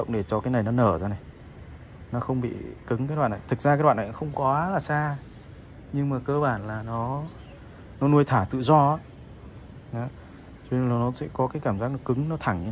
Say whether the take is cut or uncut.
uncut